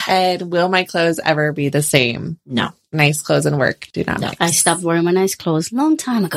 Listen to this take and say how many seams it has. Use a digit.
2